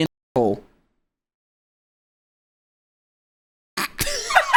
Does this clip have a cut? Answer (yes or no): no